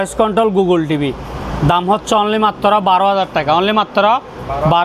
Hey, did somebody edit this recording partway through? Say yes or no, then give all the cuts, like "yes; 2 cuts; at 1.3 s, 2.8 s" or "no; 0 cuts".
no; 0 cuts